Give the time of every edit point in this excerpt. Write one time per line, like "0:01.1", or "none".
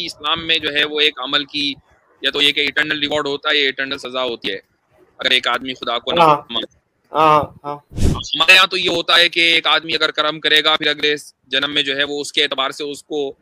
none

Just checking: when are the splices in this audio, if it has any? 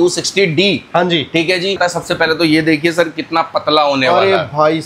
0:01.8

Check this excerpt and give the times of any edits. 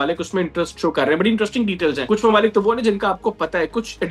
0:02.0

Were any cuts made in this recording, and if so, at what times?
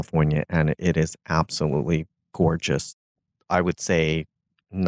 0:03.1

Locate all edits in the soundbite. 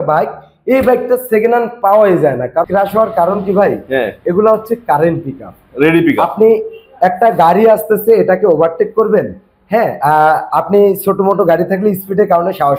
0:02.6

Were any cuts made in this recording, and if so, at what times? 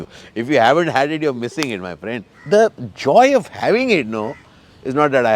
0:02.3

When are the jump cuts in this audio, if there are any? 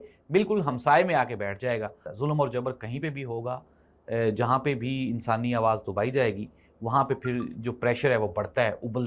0:02.1

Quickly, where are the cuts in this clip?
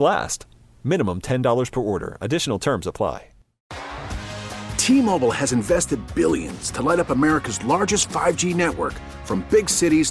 0:03.8

